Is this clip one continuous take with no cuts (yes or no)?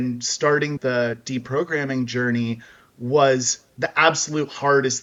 yes